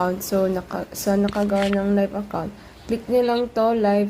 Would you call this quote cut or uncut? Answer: uncut